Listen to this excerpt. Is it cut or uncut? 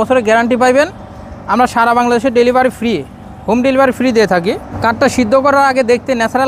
uncut